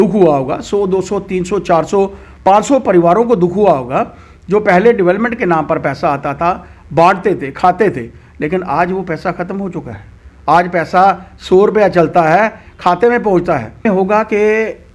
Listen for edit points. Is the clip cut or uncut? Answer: cut